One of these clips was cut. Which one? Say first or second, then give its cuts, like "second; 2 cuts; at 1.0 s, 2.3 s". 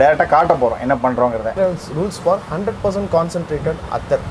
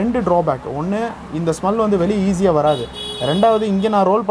first; 1 cut; at 1.5 s